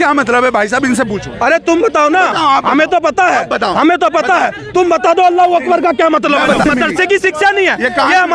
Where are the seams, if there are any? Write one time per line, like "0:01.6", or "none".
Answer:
0:06.6

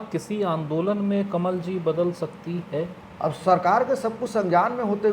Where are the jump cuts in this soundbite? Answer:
0:03.0

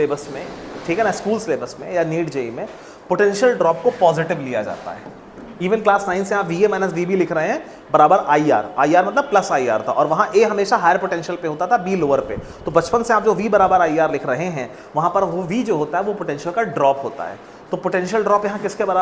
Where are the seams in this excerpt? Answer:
none

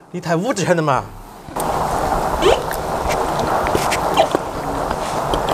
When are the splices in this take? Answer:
none

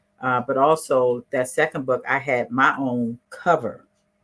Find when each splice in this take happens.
0:03.3

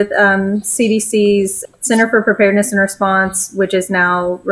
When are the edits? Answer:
0:01.6

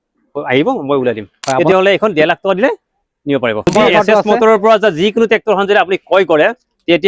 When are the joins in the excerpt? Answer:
0:01.4
0:03.7

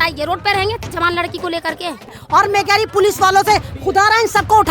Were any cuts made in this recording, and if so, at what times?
0:02.2

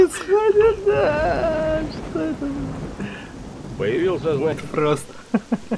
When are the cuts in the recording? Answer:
0:04.6

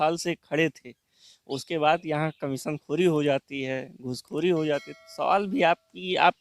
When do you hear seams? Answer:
none

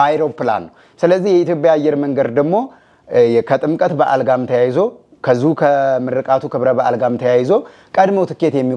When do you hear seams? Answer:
none

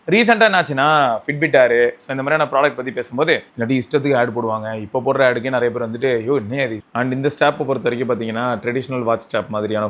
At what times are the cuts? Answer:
0:03.5
0:06.8

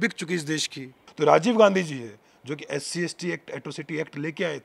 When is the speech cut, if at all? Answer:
0:01.0

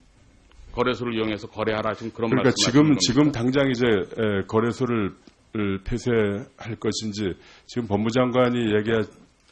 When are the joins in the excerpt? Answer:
none

